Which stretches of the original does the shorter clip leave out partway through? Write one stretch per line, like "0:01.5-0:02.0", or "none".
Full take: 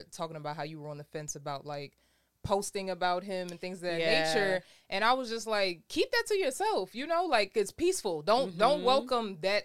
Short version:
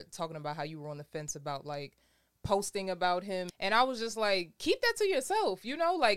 0:03.5-0:04.8

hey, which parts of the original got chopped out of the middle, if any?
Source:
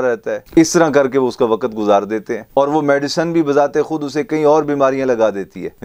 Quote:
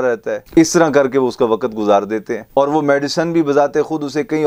none

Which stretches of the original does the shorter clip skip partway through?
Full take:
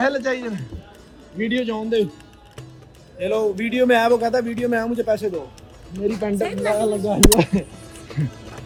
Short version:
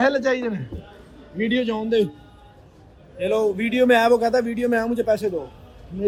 none

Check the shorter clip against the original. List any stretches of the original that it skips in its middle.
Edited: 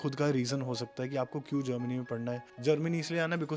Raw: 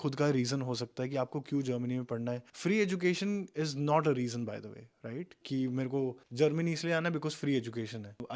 0:02.5-0:06.2

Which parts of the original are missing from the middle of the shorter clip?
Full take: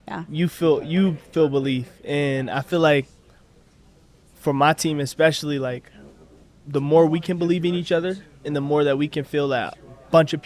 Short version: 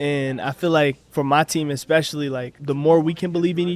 0:03.1-0:04.3
0:05.8-0:06.6

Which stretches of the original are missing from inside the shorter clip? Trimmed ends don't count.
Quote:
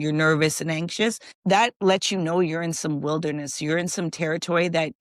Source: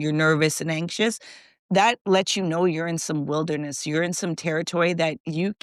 0:01.3-0:01.5

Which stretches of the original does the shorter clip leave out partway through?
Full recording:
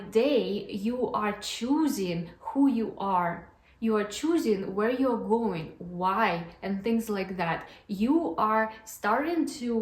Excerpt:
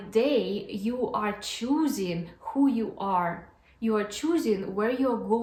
none

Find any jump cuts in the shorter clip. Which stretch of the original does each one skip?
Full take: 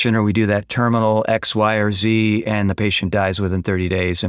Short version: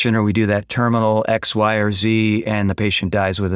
none

